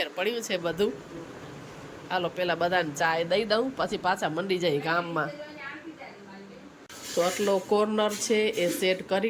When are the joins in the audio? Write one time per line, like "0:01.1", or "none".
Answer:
0:06.9

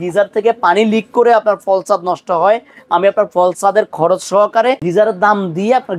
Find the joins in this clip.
none

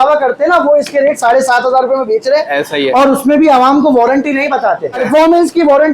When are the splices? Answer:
0:05.0

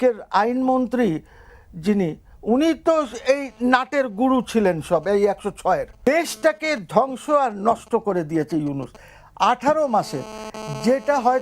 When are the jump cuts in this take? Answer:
0:05.9

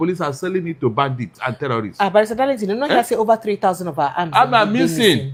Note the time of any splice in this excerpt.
none

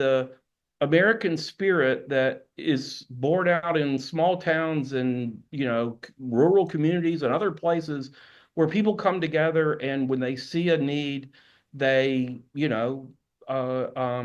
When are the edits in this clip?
none

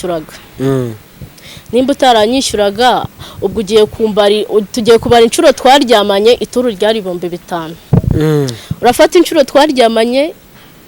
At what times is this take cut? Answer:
none

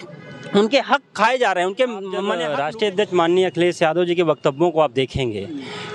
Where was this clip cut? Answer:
0:02.3

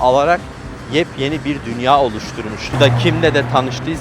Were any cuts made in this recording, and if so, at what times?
0:02.7

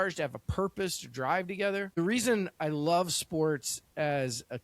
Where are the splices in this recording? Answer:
0:02.0

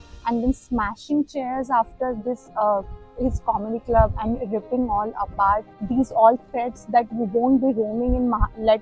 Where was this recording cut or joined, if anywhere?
0:05.7

